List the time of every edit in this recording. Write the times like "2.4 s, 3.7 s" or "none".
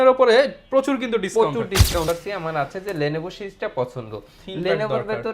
2.1 s